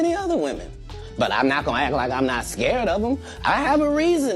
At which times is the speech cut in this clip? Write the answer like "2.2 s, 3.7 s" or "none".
none